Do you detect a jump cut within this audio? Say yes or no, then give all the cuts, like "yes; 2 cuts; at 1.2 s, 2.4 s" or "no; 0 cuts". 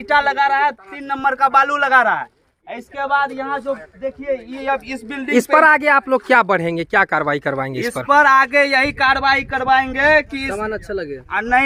no; 0 cuts